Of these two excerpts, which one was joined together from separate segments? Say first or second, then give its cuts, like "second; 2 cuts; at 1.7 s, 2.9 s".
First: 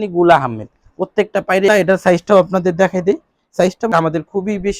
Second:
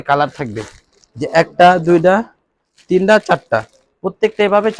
first; 2 cuts; at 1.7 s, 3.9 s